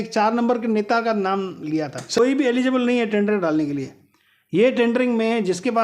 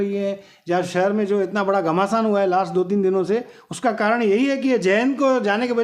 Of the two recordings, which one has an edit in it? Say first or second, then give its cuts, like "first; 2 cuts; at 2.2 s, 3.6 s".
first; 1 cut; at 2.2 s